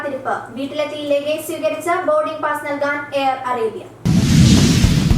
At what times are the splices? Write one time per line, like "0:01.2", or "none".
0:03.9